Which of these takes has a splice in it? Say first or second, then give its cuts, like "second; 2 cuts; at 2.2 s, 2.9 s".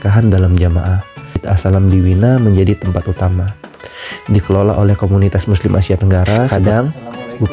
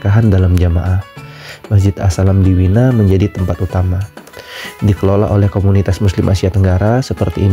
first; 2 cuts; at 1.4 s, 6.5 s